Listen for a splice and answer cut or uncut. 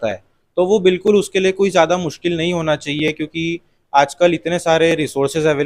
uncut